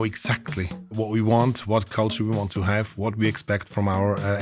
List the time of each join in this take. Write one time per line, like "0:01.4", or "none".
0:00.9